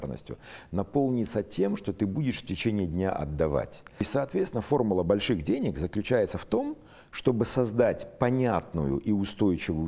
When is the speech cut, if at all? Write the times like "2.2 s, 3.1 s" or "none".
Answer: 4.0 s